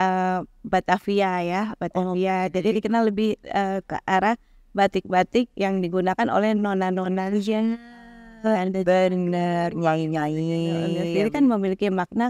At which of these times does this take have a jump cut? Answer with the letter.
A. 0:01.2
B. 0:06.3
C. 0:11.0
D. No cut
C